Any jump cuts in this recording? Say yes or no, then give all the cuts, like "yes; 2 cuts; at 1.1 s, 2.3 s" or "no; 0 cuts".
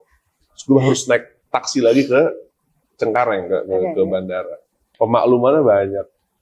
yes; 1 cut; at 4.8 s